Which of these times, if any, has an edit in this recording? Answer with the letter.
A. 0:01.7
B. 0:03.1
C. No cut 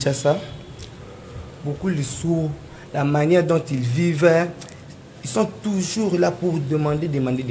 C